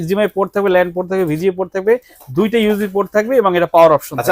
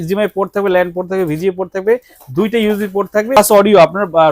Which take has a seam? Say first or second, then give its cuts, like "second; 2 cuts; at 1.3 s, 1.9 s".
second; 1 cut; at 3.4 s